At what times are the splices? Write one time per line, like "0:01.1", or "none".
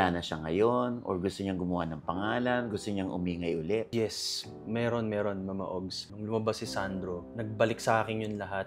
0:03.9
0:06.0